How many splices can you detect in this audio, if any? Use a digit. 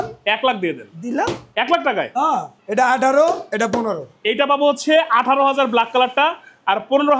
2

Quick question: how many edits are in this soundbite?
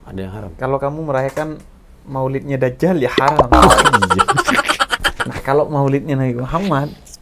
0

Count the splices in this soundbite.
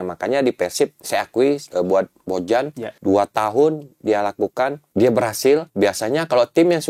4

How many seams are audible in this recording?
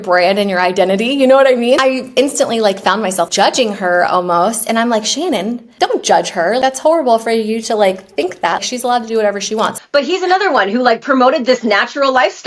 2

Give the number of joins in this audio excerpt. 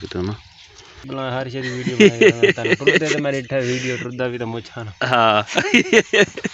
1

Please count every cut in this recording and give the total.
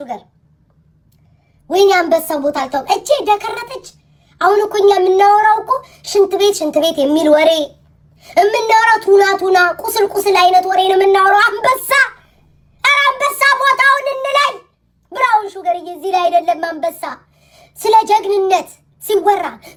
0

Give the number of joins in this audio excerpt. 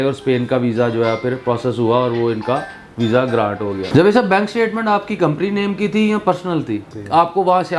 2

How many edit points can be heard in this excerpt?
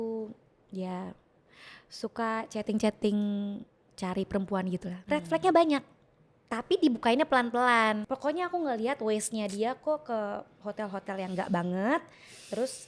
2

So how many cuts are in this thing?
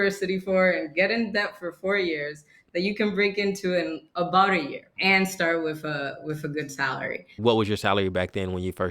2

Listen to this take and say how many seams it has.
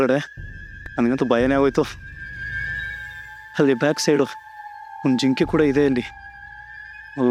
0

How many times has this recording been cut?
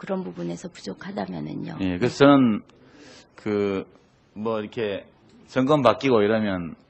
1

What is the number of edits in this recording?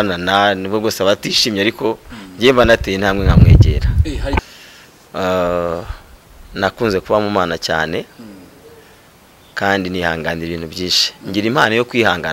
1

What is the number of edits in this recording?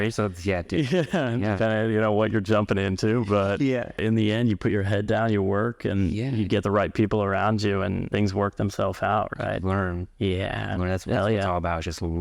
2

